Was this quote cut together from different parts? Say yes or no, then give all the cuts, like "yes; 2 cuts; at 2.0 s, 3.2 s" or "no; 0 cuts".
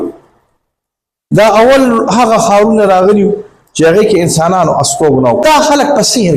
yes; 1 cut; at 5.4 s